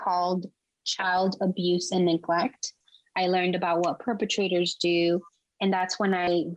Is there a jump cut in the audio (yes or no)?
yes